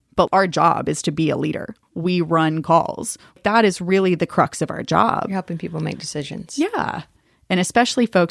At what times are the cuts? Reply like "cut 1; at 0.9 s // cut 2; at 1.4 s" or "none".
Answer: none